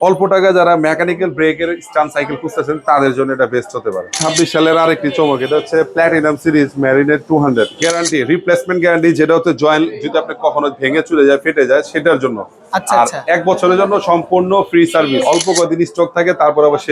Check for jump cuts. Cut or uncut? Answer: cut